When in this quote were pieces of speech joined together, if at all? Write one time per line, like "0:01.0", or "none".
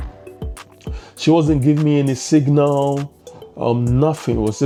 none